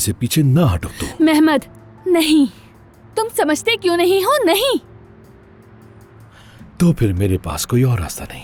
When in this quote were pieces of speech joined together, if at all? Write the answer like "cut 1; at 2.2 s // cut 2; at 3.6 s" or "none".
none